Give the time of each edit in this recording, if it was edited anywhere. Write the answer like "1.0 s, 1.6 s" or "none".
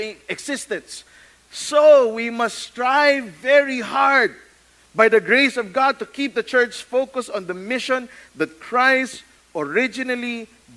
none